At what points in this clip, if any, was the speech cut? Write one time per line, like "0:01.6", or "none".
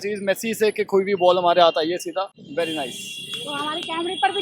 0:02.4